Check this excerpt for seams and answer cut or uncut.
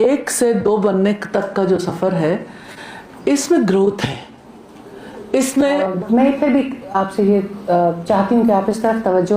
cut